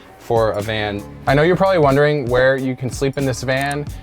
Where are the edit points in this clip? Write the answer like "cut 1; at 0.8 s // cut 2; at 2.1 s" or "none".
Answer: cut 1; at 1.0 s